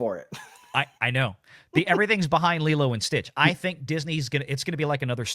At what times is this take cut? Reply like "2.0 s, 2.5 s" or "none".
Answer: none

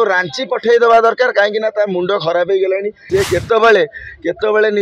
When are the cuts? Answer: 2.9 s

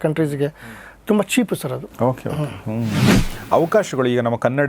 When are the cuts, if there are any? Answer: 3.1 s

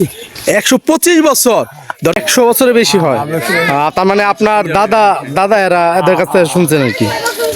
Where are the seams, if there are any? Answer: 2.2 s

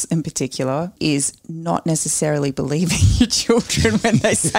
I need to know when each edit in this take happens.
1.0 s

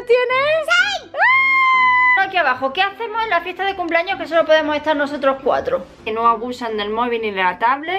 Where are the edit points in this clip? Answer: 2.1 s, 6.0 s

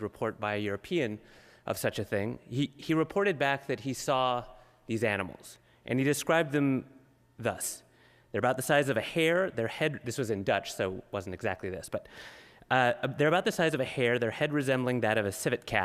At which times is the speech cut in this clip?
11.3 s

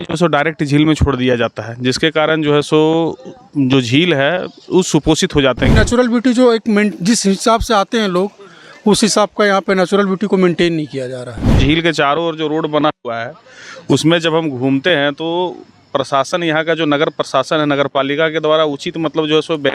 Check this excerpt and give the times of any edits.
5.7 s, 11.6 s

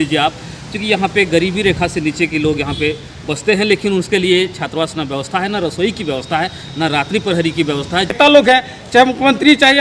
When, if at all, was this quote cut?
8.1 s

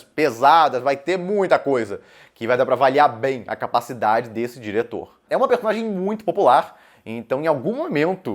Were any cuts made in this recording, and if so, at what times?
5.2 s

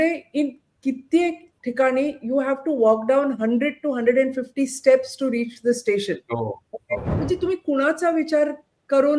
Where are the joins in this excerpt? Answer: 7.1 s

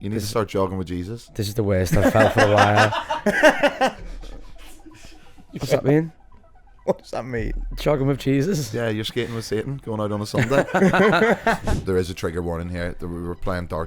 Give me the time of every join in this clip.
11.6 s

